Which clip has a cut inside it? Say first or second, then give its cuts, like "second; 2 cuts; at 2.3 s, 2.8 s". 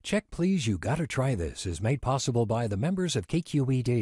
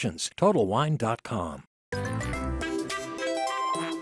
second; 1 cut; at 1.7 s